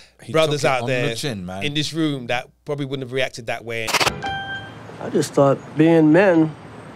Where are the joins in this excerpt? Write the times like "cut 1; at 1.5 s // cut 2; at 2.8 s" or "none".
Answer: cut 1; at 3.9 s